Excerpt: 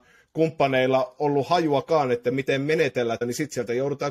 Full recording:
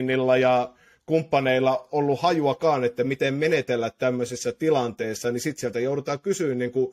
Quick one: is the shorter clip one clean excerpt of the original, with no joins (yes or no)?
no